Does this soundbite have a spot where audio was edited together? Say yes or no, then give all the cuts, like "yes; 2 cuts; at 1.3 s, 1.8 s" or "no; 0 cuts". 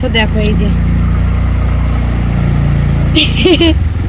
no; 0 cuts